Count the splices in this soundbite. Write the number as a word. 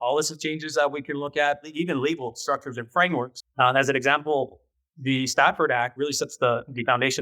two